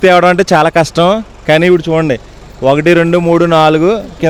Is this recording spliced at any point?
no; 0 cuts

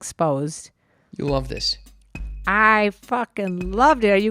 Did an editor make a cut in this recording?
no; 0 cuts

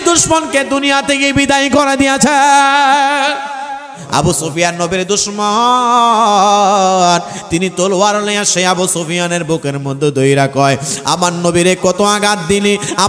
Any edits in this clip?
yes; 1 cut; at 4.0 s

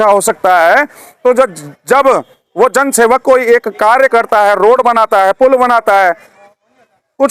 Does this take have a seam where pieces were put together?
no; 0 cuts

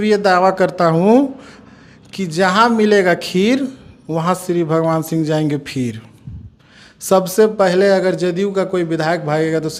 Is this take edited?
no; 0 cuts

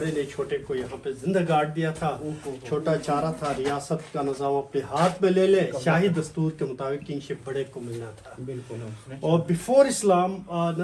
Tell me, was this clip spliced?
no; 0 cuts

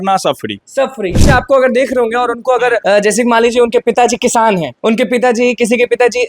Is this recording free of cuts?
no; 3 cuts; at 1.2 s, 2.8 s, 4.7 s

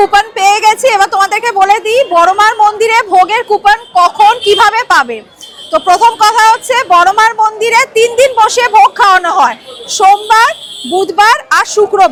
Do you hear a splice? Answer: no; 0 cuts

